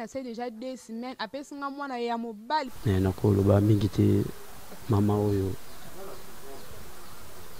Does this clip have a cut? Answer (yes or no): yes